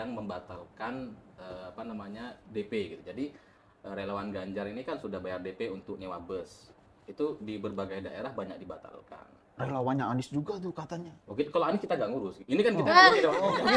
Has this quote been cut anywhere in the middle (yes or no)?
no